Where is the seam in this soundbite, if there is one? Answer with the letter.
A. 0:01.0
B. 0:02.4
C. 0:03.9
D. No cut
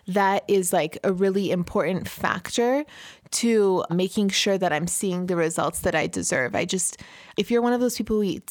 C